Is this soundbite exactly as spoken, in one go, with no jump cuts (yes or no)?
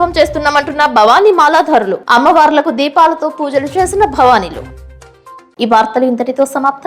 yes